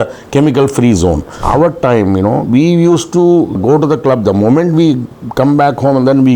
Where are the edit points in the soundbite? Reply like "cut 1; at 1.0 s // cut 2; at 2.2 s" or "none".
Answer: cut 1; at 1.4 s // cut 2; at 3.6 s